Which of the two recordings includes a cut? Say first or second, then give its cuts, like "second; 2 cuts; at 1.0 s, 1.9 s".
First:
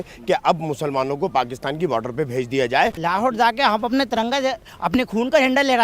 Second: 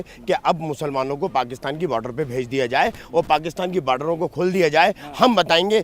first; 1 cut; at 3.0 s